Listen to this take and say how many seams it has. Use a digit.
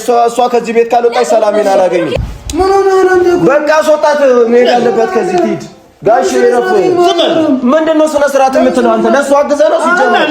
1